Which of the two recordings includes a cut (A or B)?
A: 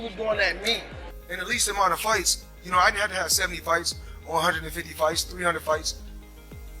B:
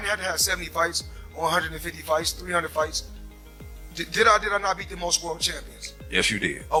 A